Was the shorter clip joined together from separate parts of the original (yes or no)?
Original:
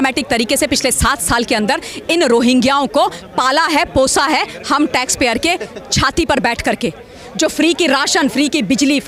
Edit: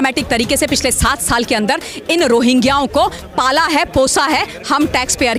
no